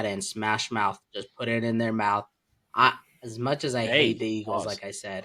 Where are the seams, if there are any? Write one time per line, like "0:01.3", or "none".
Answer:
none